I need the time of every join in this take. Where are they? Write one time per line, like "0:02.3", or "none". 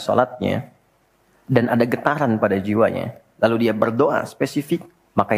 none